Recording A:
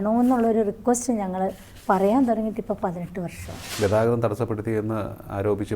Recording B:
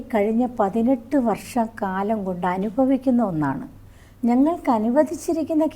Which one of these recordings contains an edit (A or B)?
A